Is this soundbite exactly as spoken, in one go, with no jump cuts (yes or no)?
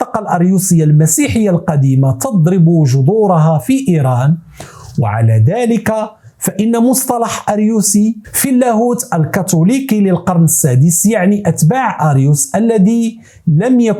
yes